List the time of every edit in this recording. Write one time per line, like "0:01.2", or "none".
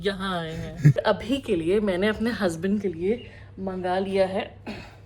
0:01.0